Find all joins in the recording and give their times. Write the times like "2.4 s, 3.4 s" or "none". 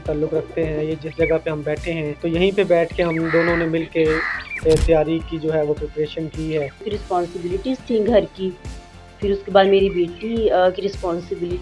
2.1 s, 6.9 s